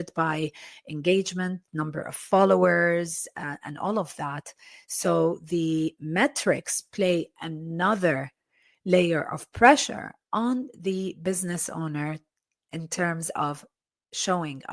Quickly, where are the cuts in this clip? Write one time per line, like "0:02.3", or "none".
none